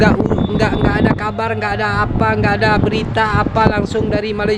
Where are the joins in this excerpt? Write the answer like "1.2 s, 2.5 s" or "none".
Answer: none

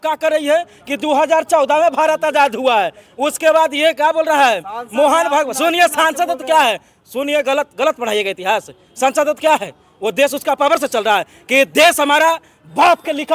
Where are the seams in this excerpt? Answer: none

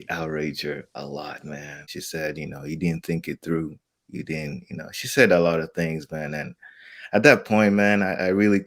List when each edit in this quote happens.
1.9 s

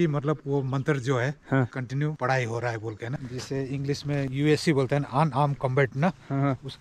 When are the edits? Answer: 2.1 s, 3.1 s, 4.3 s

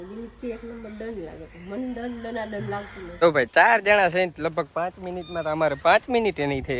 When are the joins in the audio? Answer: 3.0 s

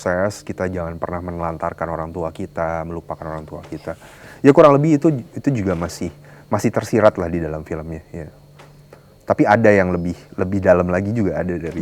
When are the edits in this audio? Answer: none

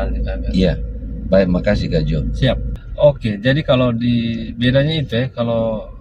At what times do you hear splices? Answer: 2.7 s

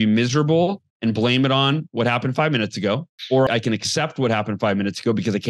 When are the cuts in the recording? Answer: 3.5 s

